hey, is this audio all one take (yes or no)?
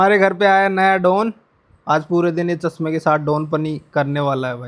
yes